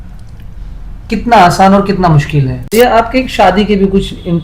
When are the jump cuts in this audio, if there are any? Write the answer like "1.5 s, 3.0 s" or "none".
2.6 s